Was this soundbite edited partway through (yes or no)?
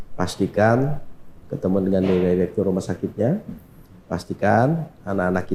no